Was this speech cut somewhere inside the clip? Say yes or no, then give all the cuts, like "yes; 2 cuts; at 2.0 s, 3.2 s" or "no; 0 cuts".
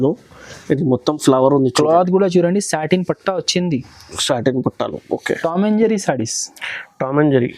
yes; 1 cut; at 5.3 s